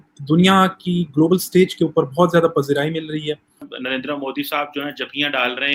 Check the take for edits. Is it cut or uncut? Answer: cut